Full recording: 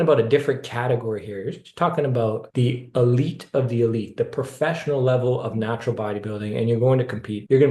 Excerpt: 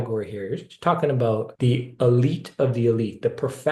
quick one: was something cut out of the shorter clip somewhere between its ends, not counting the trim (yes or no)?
no